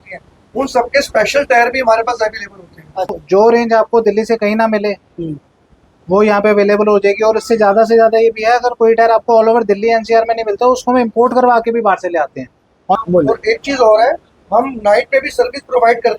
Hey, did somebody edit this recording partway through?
yes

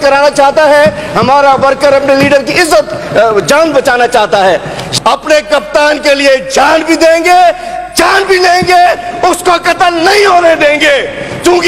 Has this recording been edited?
yes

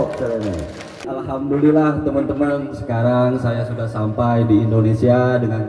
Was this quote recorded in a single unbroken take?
no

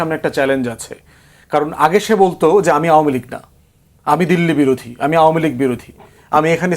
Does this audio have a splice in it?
no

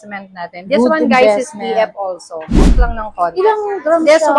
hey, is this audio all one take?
no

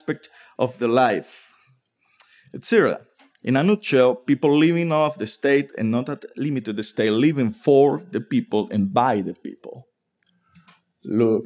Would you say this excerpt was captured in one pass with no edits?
no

